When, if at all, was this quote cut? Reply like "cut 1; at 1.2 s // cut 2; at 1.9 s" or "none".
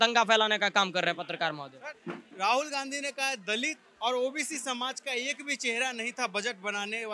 none